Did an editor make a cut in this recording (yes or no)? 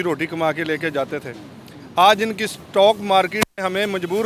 no